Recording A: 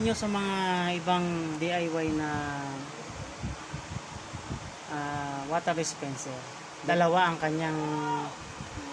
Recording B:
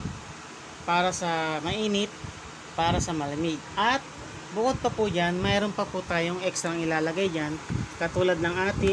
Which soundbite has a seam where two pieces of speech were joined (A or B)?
A